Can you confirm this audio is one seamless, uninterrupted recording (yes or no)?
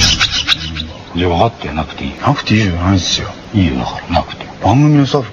no